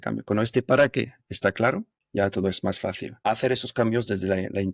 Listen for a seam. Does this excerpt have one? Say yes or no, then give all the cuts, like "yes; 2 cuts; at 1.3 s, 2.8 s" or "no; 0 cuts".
yes; 2 cuts; at 1.9 s, 3.1 s